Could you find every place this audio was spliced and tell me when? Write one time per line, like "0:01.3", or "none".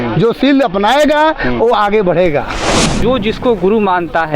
0:03.0